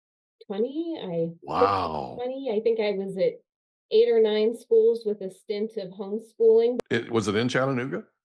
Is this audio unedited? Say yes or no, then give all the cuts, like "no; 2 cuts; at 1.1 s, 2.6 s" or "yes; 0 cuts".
no; 1 cut; at 6.8 s